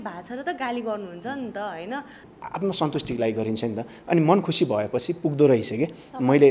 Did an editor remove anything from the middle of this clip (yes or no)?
yes